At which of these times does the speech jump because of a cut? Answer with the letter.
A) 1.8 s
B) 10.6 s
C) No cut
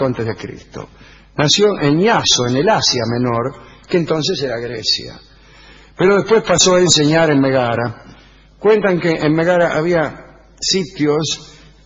A